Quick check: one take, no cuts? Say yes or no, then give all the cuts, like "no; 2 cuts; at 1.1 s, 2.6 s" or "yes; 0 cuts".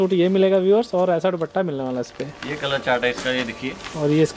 yes; 0 cuts